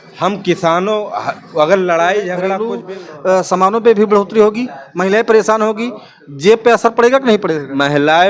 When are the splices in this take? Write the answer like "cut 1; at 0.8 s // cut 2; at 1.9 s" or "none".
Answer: cut 1; at 2.6 s